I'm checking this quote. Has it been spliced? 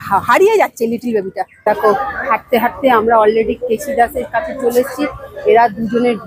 yes; 1 cut; at 1.6 s

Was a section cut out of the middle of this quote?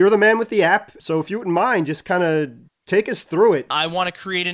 yes; 2 cuts; at 0.9 s, 3.7 s

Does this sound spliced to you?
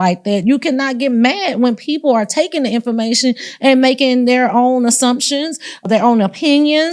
no; 0 cuts

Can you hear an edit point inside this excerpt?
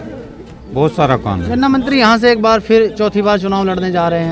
no; 0 cuts

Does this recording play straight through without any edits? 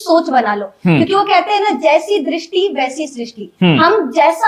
yes; 0 cuts

